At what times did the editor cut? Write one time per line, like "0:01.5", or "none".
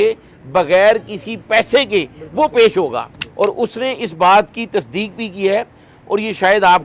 0:03.2